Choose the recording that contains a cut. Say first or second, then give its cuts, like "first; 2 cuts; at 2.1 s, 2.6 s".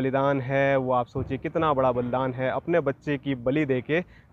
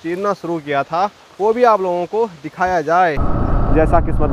second; 1 cut; at 3.3 s